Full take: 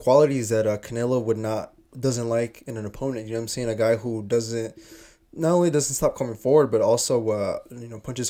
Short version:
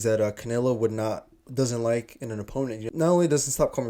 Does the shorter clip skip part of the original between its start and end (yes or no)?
yes